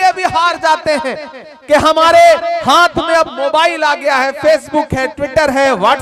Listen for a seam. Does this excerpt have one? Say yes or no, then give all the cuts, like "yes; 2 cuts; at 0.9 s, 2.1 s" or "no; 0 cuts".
no; 0 cuts